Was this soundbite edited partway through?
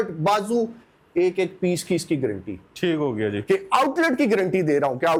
no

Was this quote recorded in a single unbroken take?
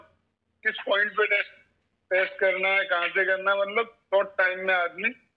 yes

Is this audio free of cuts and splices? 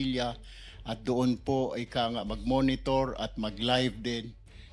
yes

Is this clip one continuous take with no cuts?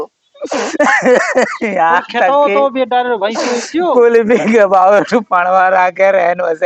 yes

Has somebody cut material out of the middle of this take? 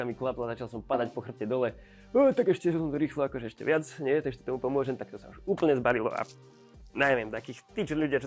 no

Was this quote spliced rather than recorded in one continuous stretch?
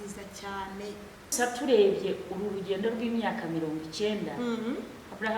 yes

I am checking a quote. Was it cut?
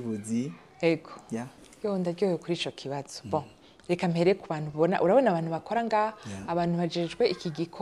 yes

